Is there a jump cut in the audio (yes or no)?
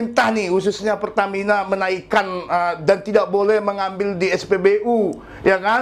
no